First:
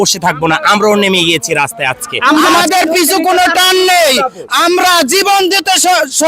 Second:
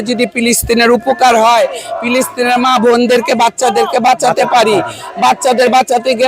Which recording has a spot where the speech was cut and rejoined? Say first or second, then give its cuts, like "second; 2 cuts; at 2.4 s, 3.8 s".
first; 1 cut; at 2.5 s